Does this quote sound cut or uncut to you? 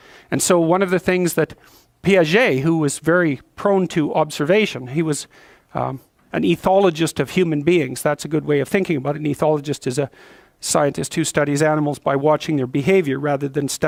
uncut